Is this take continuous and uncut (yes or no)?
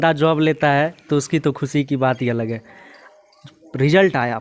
yes